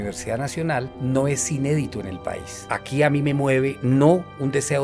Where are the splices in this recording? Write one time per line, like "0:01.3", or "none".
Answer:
0:00.9
0:02.6